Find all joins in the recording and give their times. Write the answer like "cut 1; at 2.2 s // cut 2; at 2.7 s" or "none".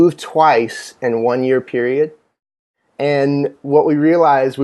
cut 1; at 2.3 s